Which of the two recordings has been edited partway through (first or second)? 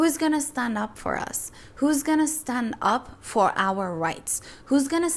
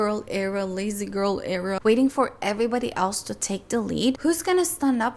second